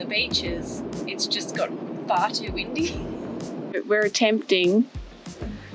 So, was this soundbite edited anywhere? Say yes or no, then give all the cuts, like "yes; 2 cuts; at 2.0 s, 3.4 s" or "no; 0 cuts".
yes; 1 cut; at 3.8 s